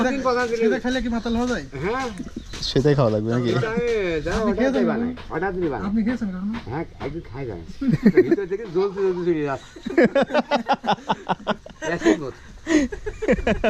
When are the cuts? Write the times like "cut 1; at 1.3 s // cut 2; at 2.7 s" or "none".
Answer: none